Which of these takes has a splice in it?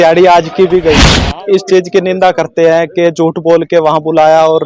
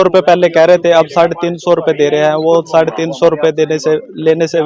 first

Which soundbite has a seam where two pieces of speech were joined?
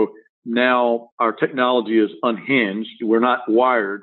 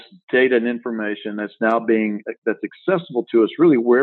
first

